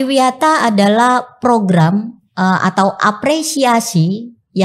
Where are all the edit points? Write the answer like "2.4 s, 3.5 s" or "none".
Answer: none

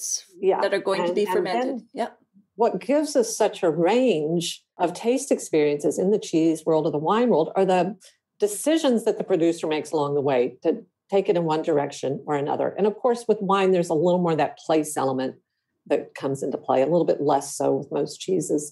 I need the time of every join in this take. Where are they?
none

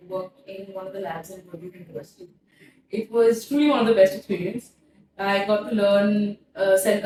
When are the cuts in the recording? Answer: none

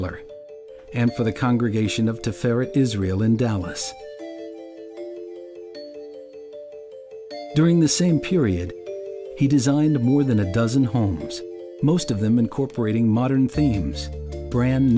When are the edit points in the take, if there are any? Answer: 2.8 s

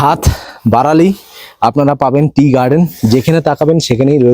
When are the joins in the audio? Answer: none

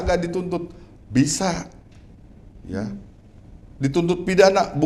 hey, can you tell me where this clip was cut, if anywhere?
none

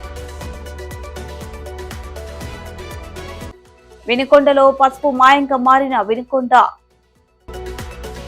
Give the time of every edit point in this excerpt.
none

